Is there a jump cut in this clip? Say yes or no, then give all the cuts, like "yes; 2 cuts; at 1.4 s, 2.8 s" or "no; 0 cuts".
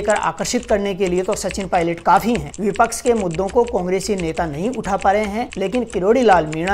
yes; 1 cut; at 2.5 s